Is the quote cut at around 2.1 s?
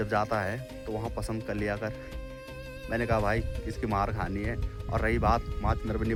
no; 0 cuts

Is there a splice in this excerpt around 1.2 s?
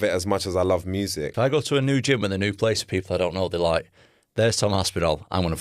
yes; 1 cut; at 1.2 s

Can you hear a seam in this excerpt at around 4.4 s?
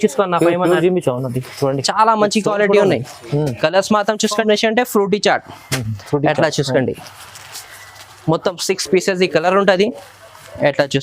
yes; 1 cut; at 4.4 s

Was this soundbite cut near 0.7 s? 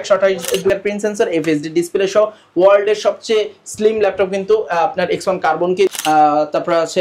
yes; 2 cuts; at 0.7 s, 5.9 s

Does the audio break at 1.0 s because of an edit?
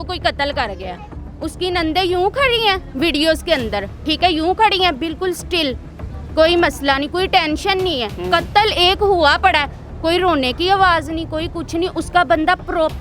yes; 1 cut; at 1.0 s

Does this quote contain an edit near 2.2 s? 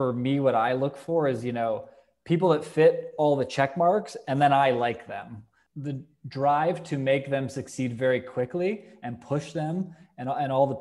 no; 1 cut; at 5.7 s

